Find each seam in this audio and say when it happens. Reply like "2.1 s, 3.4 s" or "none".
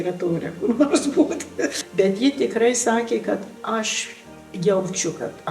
1.8 s